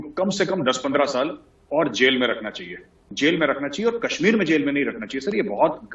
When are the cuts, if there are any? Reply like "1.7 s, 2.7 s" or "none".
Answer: 3.0 s